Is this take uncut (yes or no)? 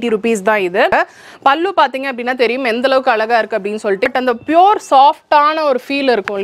no